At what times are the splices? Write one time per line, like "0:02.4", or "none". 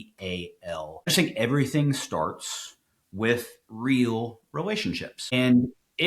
0:01.1
0:05.3